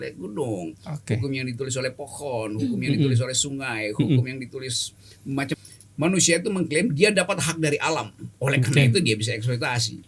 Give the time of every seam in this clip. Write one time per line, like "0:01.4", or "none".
0:05.5